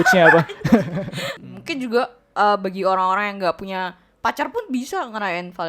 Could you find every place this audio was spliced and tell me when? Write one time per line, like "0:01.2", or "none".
0:01.3